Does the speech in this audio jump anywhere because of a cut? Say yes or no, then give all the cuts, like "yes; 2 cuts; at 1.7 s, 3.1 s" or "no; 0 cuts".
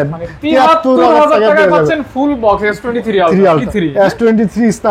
yes; 1 cut; at 3.6 s